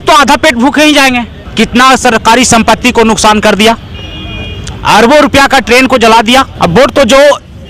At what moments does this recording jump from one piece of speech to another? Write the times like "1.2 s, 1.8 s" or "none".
1.4 s, 6.5 s